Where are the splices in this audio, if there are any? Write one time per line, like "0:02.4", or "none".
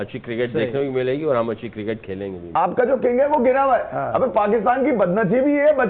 0:02.5